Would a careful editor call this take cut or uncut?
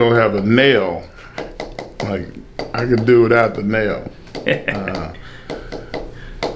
uncut